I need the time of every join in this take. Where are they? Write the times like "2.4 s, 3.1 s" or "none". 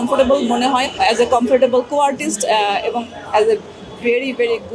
0.9 s